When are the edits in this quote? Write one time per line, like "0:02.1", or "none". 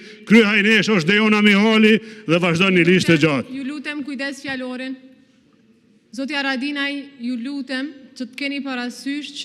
none

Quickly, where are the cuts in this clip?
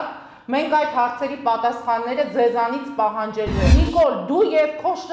0:03.7

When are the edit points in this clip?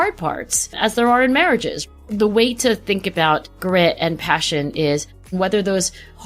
0:01.8
0:03.5
0:05.3

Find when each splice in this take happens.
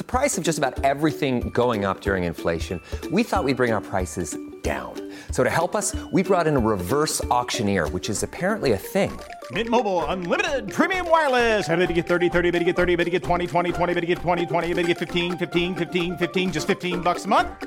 none

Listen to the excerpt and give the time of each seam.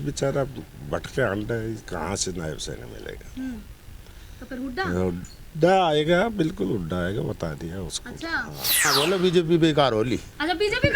0:08.9

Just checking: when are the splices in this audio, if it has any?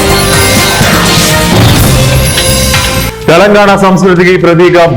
0:03.1

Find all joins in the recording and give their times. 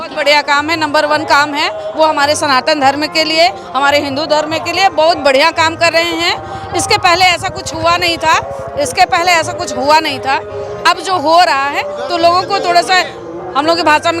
none

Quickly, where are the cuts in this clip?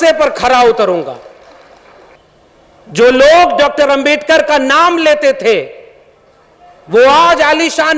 0:02.2

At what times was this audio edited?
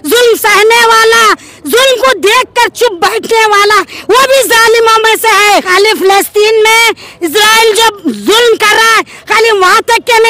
0:05.7

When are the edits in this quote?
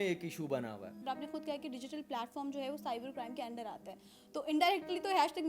0:01.1

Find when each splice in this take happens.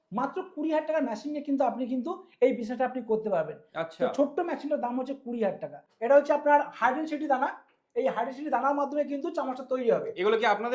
0:05.8

